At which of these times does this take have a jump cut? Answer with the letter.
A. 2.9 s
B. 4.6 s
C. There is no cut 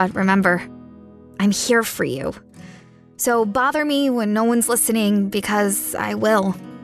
C